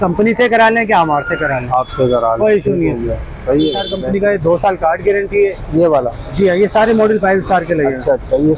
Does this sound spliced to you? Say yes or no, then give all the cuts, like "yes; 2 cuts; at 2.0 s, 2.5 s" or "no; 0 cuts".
yes; 1 cut; at 3.9 s